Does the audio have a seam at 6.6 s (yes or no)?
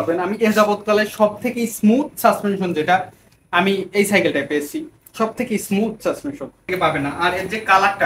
yes